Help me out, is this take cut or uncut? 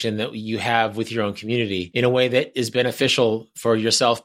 cut